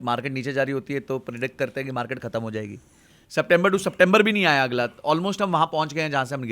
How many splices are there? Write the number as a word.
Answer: one